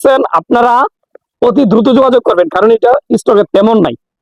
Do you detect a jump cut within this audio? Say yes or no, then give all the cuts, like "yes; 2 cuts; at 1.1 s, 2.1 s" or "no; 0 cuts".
no; 0 cuts